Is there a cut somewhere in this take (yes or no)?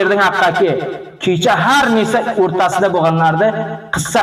no